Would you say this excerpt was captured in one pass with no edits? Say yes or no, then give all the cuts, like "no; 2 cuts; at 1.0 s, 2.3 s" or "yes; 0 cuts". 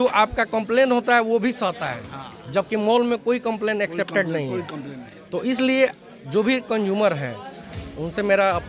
yes; 0 cuts